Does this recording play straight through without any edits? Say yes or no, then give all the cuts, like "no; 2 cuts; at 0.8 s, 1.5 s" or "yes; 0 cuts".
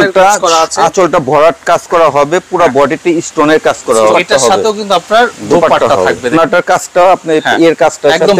no; 2 cuts; at 4.1 s, 6.3 s